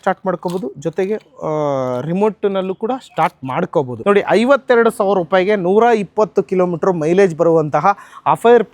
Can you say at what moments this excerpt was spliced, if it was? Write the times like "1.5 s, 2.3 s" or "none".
3.9 s

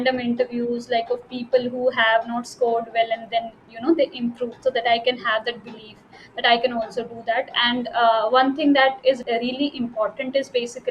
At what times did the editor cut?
9.2 s

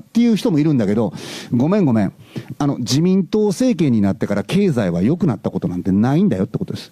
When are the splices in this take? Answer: none

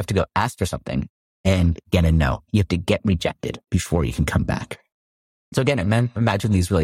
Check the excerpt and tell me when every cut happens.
none

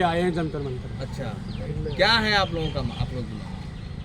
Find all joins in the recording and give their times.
none

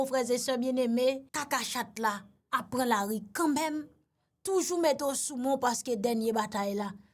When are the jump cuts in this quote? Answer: 1.3 s, 2.3 s

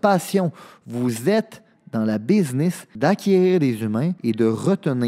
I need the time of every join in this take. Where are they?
2.9 s, 4.2 s

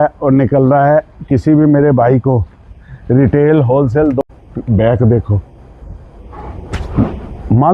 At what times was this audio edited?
4.2 s

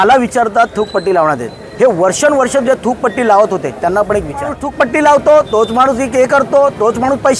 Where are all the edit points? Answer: 4.6 s

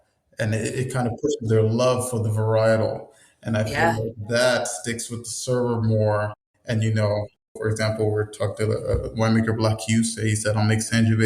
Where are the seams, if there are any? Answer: 7.6 s

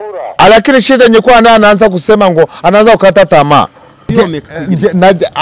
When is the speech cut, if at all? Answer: 4.0 s

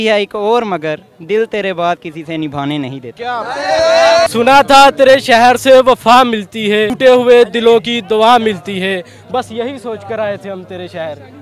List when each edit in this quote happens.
4.3 s, 6.9 s

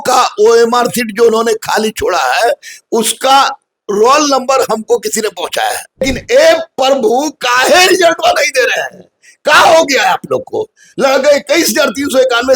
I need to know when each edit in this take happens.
6.0 s

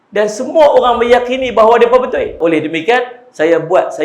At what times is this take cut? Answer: 2.4 s

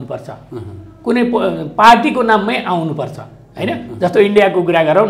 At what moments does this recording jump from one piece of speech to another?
none

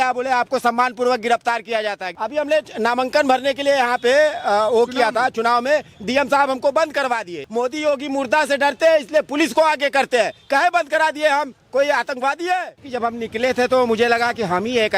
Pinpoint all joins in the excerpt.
2.1 s, 7.4 s, 12.8 s

